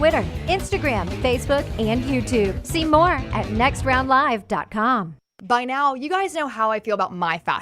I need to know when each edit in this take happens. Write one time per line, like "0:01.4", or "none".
0:05.2